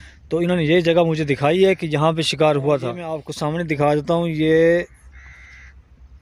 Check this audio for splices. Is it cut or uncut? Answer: cut